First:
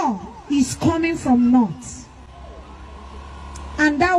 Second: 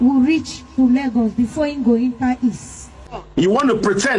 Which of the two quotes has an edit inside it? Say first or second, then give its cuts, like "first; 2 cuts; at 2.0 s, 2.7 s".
second; 1 cut; at 3.2 s